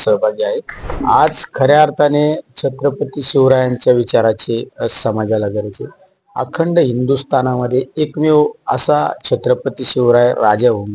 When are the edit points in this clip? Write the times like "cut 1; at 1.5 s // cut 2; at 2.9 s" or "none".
cut 1; at 0.9 s